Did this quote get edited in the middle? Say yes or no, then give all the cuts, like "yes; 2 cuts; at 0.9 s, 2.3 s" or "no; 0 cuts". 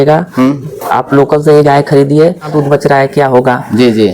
yes; 1 cut; at 2.5 s